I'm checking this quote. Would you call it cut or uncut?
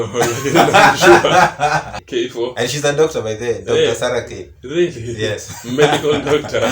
cut